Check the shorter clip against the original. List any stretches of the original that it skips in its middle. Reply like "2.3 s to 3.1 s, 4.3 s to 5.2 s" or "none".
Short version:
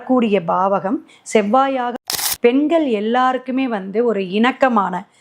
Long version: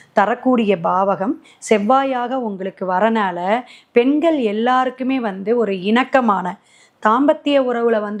2.6 s to 3.7 s